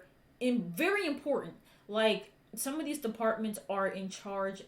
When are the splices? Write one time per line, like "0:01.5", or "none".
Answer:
none